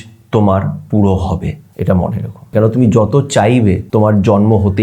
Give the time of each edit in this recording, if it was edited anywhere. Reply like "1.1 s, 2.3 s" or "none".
1.6 s, 2.5 s, 3.8 s